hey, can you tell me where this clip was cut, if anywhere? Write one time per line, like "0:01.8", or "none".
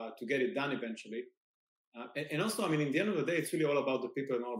none